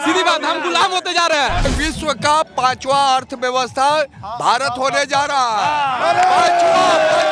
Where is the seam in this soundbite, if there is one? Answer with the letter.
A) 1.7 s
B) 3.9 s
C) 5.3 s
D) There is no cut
A